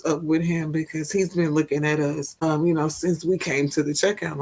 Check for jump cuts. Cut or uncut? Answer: cut